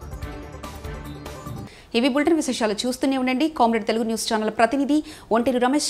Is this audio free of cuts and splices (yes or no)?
yes